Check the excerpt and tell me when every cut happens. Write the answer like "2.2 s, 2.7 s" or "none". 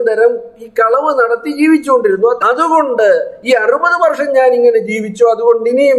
2.4 s